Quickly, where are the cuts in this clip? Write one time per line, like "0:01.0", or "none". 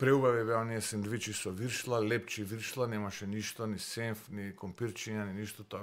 none